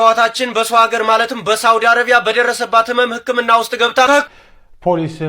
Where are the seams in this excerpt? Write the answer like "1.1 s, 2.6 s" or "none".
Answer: 4.3 s